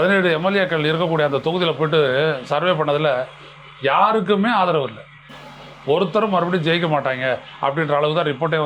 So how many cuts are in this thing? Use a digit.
0